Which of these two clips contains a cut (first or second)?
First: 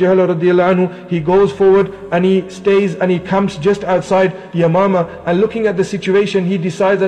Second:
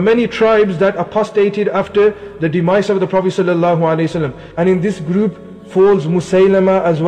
second